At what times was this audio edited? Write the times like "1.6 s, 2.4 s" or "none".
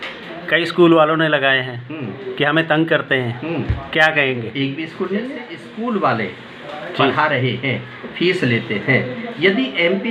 5.6 s